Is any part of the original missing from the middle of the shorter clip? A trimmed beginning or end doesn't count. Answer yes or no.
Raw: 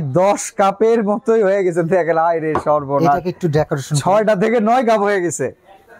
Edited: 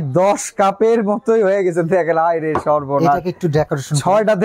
no